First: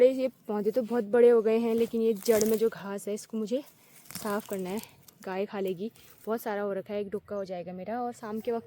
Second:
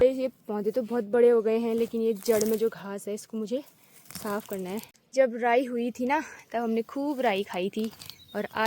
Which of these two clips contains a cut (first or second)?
second